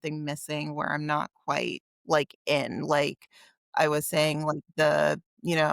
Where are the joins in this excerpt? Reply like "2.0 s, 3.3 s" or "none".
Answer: 1.9 s